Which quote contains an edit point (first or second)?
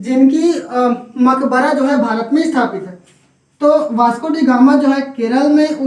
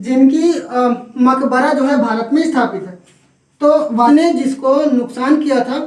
second